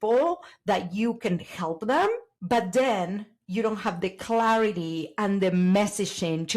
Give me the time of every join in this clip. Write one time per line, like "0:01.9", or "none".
0:02.3